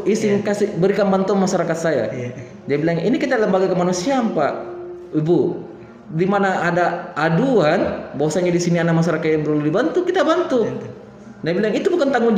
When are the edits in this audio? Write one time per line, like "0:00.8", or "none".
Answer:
none